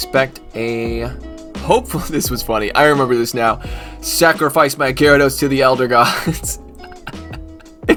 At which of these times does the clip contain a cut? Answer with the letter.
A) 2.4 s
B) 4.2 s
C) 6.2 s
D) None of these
D